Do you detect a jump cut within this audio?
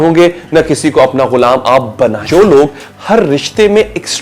yes; 1 cut; at 2.2 s

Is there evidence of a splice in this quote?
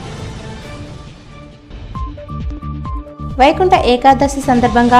no; 0 cuts

